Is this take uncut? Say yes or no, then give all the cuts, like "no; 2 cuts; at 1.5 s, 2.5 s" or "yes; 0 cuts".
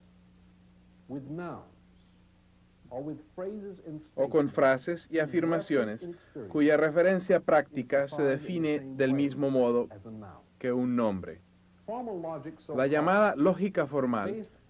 no; 1 cut; at 1.4 s